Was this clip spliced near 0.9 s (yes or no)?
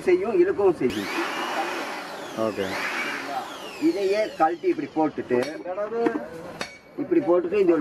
yes